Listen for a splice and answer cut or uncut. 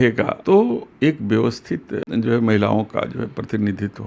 cut